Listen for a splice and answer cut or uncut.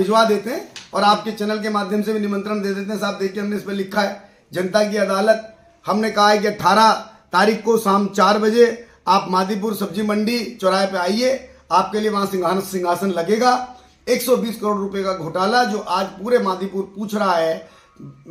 uncut